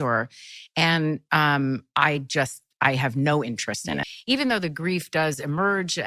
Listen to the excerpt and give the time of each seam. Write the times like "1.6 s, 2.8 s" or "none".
4.1 s